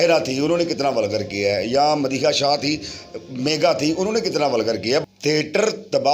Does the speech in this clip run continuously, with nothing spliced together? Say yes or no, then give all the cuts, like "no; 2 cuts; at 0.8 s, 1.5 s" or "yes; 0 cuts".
no; 1 cut; at 5.0 s